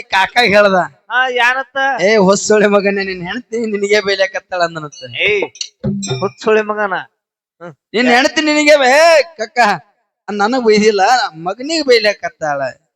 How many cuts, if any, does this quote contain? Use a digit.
0